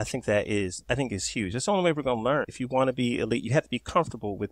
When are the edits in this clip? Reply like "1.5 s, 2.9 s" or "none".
2.6 s